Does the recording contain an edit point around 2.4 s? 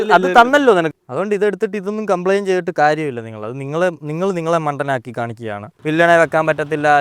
no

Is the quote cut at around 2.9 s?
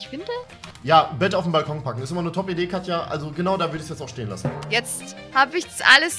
no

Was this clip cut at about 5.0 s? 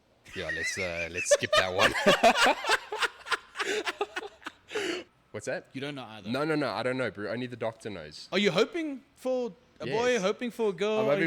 yes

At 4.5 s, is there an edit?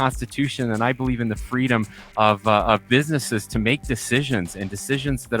no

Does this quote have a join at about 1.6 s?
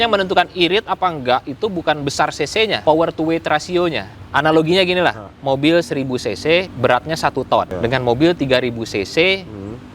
no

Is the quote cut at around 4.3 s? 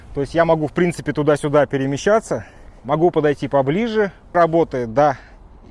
yes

